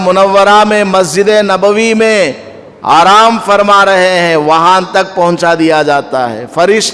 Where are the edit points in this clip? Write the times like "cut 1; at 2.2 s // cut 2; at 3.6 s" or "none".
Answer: none